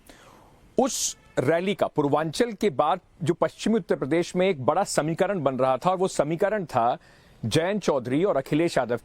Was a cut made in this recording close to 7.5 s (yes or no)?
no